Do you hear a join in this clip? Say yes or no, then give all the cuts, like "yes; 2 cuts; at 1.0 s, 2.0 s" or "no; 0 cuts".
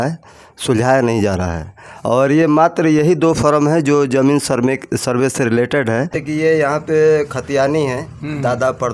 yes; 1 cut; at 6.2 s